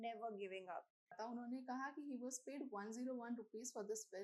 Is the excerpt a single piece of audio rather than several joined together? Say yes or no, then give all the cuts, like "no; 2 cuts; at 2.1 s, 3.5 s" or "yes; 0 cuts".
no; 1 cut; at 1.2 s